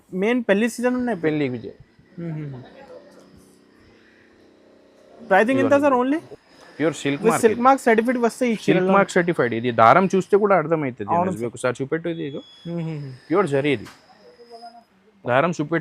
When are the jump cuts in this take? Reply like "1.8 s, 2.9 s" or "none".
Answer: 6.3 s